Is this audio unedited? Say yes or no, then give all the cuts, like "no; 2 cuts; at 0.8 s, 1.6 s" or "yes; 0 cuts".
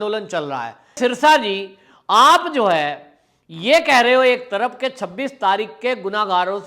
no; 1 cut; at 1.0 s